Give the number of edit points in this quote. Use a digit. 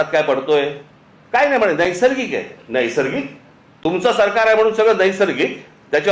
1